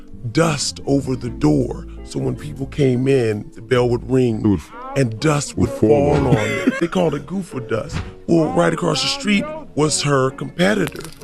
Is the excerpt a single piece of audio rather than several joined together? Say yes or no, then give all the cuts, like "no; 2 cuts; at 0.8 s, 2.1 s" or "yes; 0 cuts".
no; 1 cut; at 6.8 s